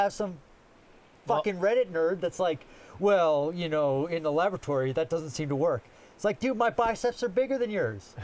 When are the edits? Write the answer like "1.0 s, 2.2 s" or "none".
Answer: none